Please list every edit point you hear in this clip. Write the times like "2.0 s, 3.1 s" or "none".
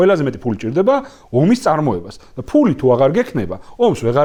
none